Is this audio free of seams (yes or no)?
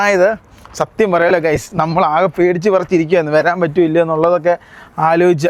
yes